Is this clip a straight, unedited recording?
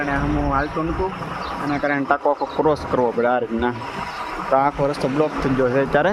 yes; 0 cuts

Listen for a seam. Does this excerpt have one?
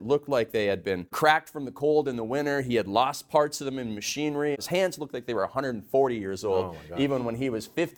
yes; 2 cuts; at 1.1 s, 4.5 s

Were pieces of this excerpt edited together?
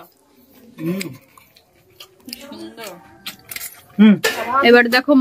yes; 1 cut; at 4.3 s

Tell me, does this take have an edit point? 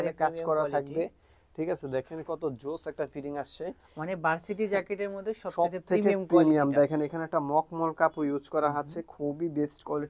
no; 0 cuts

